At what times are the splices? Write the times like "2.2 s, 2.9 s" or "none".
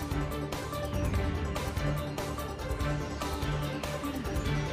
none